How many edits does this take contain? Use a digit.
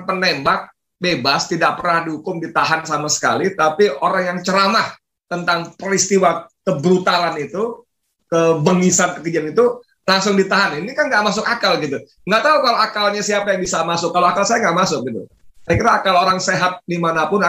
0